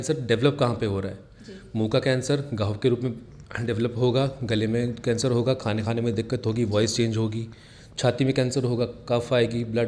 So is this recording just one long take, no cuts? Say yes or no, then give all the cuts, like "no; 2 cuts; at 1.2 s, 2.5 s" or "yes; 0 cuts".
yes; 0 cuts